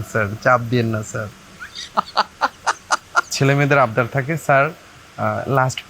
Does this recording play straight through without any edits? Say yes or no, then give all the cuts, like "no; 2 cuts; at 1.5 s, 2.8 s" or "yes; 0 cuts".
no; 1 cut; at 3.3 s